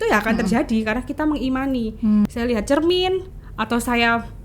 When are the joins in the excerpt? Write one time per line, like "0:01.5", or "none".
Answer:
0:02.3